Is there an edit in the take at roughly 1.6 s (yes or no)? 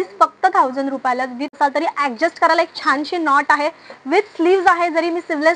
yes